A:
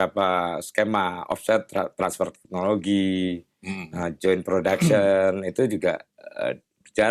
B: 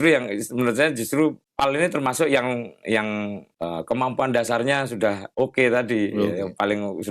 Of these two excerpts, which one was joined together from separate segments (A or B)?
B